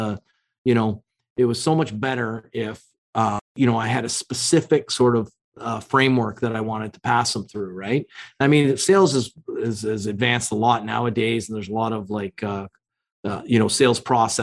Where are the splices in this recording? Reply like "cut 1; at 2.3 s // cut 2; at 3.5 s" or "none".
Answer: none

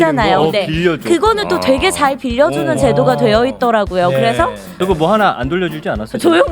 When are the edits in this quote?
cut 1; at 4.7 s

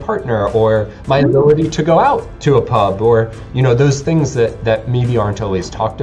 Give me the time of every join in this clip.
none

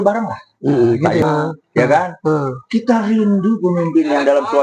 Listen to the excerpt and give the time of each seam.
cut 1; at 1.2 s

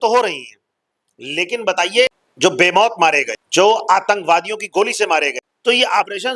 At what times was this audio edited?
cut 1; at 2.2 s // cut 2; at 3.3 s // cut 3; at 5.4 s

